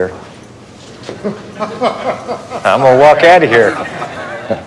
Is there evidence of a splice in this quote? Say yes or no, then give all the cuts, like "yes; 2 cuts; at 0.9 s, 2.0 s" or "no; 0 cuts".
no; 0 cuts